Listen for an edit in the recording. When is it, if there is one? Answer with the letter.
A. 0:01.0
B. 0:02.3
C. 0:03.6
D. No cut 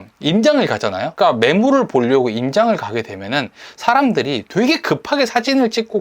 A